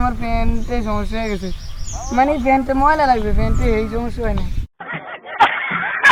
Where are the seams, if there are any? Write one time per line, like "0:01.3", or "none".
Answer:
0:04.5